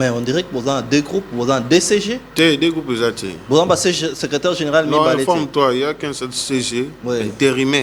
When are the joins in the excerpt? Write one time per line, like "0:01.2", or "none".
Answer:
none